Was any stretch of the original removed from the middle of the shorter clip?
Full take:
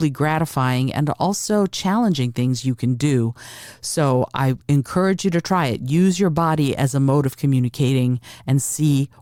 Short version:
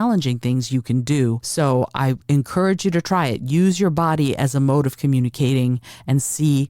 yes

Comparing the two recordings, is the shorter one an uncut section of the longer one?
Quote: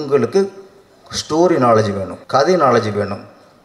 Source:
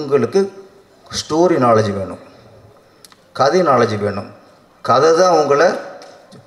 no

